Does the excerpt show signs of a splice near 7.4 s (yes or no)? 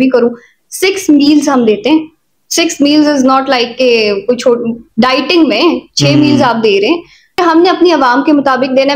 yes